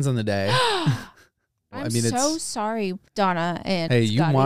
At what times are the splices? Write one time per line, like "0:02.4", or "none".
0:01.8
0:03.0